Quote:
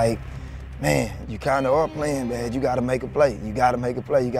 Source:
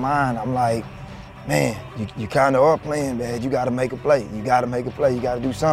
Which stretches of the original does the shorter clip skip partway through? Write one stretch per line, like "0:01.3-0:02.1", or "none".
0:01.9-0:02.1